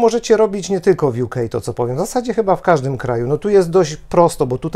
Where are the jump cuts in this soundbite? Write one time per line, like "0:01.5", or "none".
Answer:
none